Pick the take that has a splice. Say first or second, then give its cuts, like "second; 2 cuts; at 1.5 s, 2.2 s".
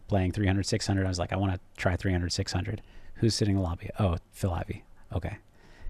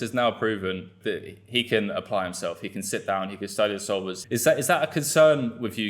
second; 2 cuts; at 1.0 s, 4.2 s